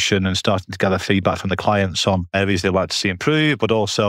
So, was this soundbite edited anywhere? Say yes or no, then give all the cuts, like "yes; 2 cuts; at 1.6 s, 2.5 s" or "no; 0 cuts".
yes; 1 cut; at 2.3 s